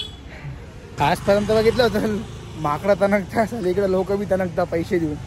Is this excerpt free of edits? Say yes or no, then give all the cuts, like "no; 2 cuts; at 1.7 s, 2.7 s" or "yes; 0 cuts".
no; 1 cut; at 1.0 s